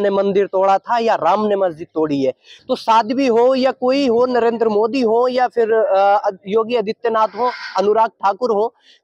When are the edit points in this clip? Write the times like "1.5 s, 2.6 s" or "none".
2.5 s